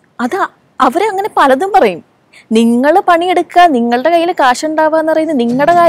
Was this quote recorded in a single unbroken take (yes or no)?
yes